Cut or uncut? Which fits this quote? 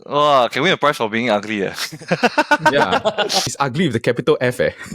cut